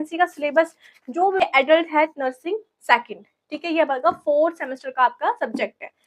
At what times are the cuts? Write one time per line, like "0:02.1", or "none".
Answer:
0:01.4

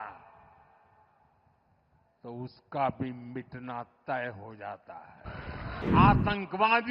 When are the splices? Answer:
0:05.8

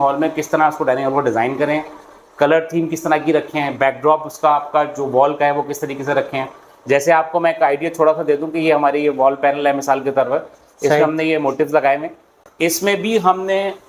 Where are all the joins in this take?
none

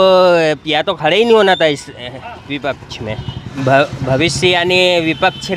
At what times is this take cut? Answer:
0:03.4

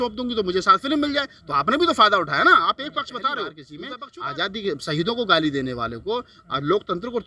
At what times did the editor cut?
0:04.0

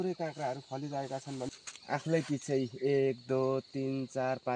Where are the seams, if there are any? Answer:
0:01.5

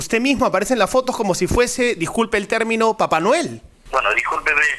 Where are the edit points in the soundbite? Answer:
0:03.7

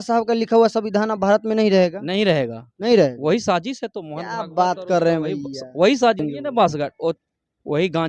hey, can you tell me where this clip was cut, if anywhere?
0:06.2

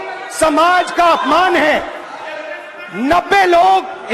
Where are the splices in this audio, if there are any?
none

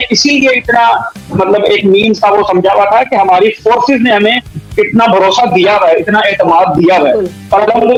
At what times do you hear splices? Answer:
none

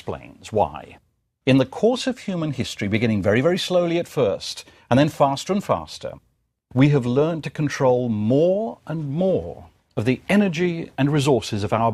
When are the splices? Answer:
0:07.9

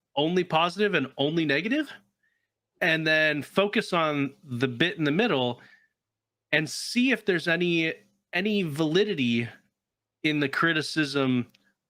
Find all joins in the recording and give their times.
none

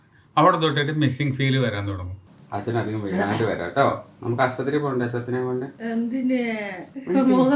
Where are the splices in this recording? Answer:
0:02.3

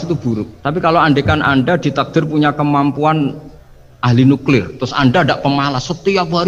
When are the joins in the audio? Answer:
none

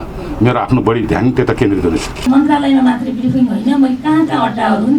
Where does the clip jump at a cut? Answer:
0:02.2

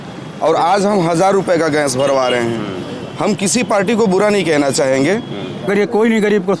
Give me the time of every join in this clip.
0:05.7

